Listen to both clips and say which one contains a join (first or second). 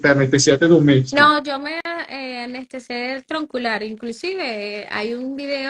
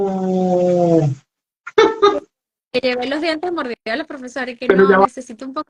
first